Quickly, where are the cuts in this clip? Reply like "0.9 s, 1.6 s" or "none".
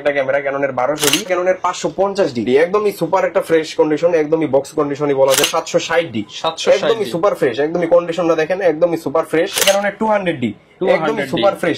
1.3 s, 2.5 s, 5.5 s, 9.6 s